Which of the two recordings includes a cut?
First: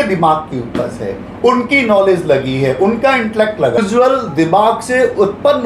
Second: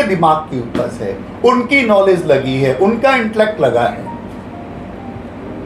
first; 1 cut; at 3.8 s

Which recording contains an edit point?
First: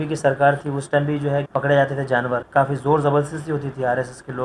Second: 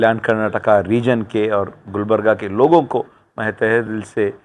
first; 2 cuts; at 1.5 s, 2.4 s

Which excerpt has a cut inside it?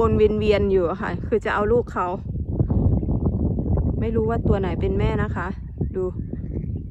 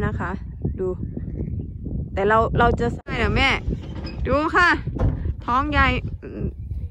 second; 1 cut; at 2.9 s

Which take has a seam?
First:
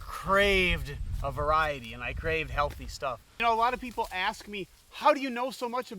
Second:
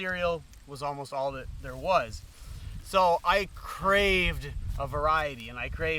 first; 1 cut; at 3.4 s

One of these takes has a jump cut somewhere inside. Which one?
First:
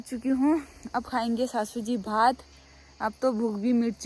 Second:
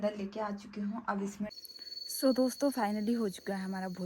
second; 1 cut; at 1.5 s

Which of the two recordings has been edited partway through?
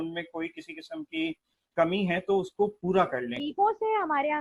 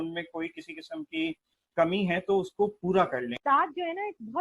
second; 1 cut; at 3.3 s

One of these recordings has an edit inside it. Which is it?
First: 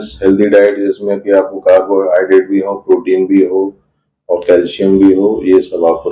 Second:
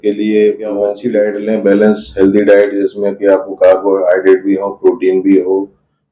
second; 1 cut; at 1.0 s

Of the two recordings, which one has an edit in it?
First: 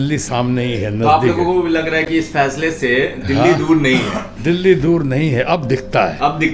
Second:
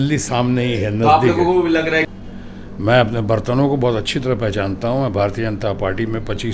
second; 1 cut; at 2.1 s

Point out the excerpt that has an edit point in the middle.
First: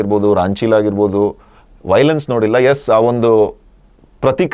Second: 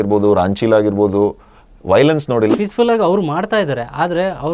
second; 1 cut; at 2.5 s

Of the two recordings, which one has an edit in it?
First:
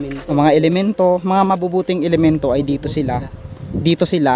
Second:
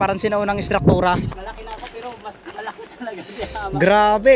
second; 1 cut; at 1.3 s

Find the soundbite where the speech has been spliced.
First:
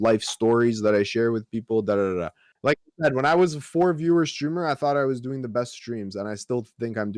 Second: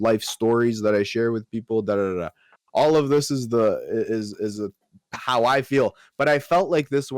first; 1 cut; at 2.4 s

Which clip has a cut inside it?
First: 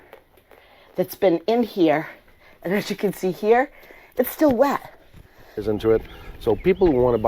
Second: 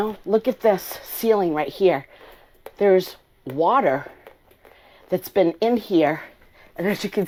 first; 1 cut; at 5.6 s

